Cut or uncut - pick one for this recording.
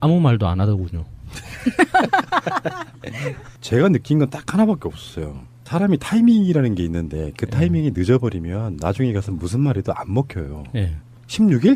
cut